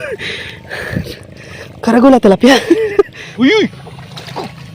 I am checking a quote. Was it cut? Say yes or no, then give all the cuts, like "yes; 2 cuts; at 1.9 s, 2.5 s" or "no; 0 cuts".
yes; 1 cut; at 3.2 s